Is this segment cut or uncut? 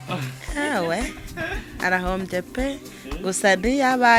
uncut